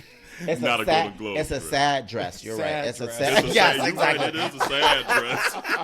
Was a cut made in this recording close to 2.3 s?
no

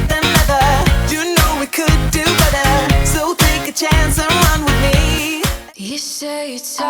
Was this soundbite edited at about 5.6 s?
yes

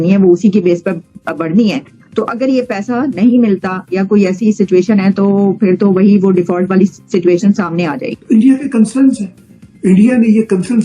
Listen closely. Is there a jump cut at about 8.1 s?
yes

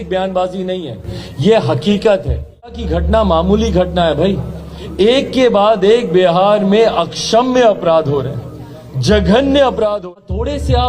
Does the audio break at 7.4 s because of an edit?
no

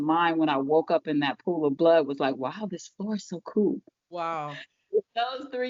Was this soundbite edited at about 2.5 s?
no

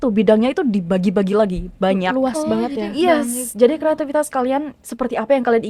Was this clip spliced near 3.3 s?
no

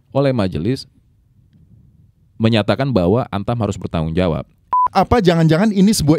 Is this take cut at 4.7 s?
yes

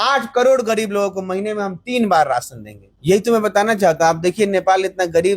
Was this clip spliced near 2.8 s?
yes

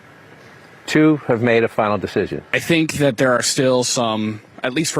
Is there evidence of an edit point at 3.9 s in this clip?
no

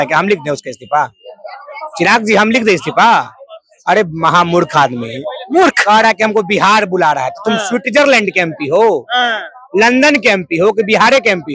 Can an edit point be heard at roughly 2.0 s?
no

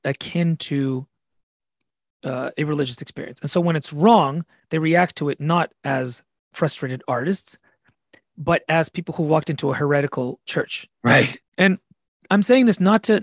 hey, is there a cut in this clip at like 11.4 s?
yes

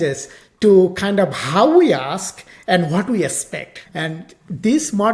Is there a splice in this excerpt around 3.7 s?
yes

